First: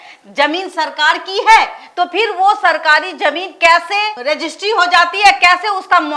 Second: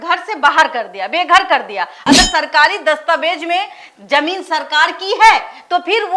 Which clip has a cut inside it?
second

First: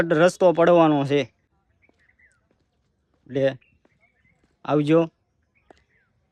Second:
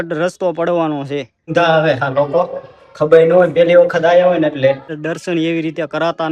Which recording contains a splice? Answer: second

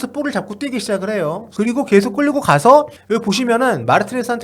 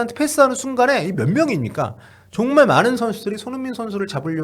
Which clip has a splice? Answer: first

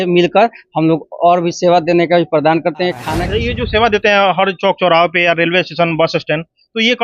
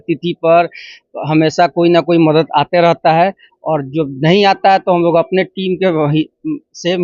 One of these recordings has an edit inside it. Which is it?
first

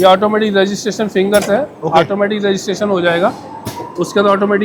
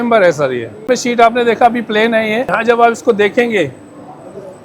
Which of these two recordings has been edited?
second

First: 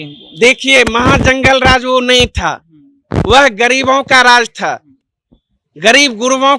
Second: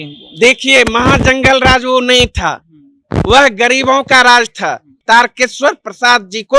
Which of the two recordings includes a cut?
second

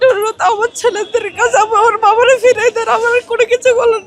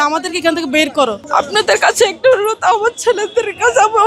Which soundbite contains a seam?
second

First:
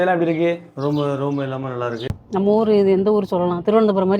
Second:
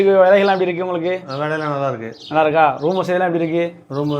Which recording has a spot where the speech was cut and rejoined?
first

